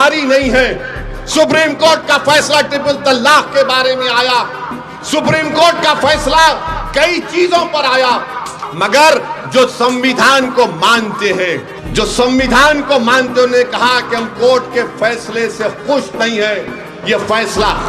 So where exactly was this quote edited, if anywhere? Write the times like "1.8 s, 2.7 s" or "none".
8.6 s, 11.8 s